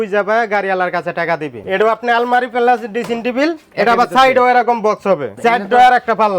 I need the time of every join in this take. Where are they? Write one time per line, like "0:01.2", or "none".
0:01.6
0:05.3